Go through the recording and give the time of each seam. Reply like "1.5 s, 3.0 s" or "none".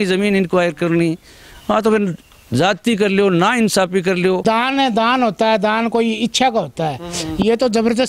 4.4 s